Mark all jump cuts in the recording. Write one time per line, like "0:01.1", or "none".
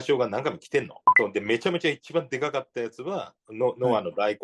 0:01.0